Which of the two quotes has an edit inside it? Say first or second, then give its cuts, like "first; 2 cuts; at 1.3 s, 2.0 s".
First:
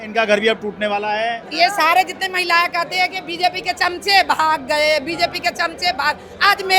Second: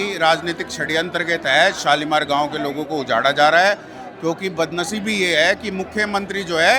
first; 1 cut; at 1.4 s